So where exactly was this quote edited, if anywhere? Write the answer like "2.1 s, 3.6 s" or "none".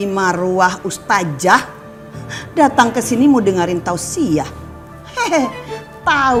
none